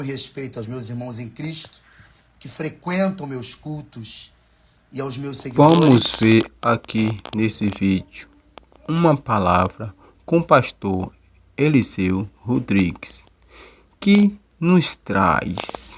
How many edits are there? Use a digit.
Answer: 1